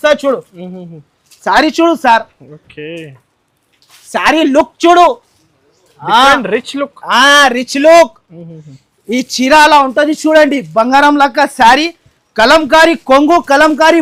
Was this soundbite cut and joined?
no; 0 cuts

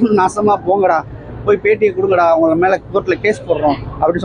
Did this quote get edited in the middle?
no; 0 cuts

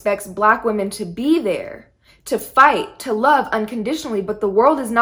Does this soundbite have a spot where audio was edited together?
no; 0 cuts

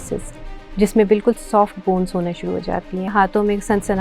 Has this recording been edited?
yes; 1 cut; at 3.1 s

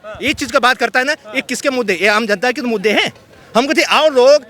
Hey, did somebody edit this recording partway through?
no; 0 cuts

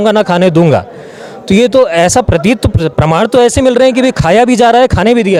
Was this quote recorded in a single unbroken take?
yes; 0 cuts

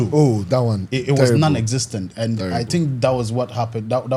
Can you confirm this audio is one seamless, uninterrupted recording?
yes; 0 cuts

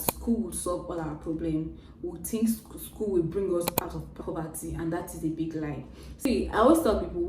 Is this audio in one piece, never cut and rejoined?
no; 1 cut; at 6.0 s

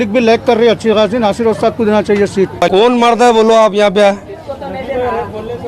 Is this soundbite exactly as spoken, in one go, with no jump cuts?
no; 1 cut; at 2.6 s

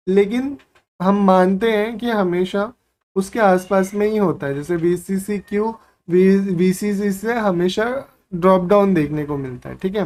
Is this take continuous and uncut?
yes; 0 cuts

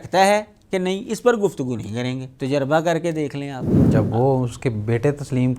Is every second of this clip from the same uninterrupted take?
no; 2 cuts; at 2.3 s, 3.7 s

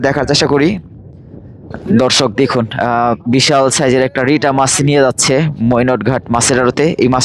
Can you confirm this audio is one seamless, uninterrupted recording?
no; 1 cut; at 1.8 s

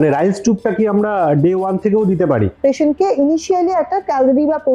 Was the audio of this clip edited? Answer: yes; 1 cut; at 2.5 s

